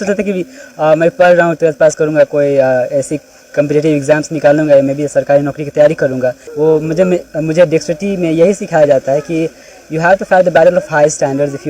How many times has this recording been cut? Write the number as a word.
one